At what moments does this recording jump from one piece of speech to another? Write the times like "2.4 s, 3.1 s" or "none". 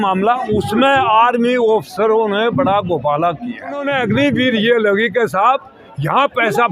3.9 s